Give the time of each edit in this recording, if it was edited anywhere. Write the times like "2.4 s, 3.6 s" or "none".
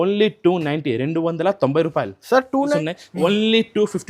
2.8 s